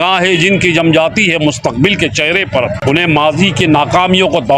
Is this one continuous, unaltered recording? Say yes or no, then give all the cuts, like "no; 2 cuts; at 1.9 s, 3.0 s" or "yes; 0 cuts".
no; 1 cut; at 2.8 s